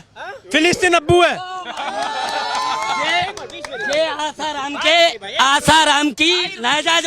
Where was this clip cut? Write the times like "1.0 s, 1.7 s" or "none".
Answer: none